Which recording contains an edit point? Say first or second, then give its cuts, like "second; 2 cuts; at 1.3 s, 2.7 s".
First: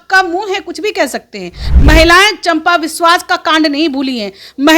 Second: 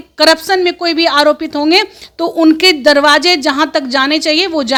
first; 1 cut; at 1.6 s